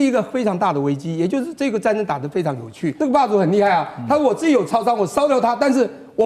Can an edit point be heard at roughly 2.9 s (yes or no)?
yes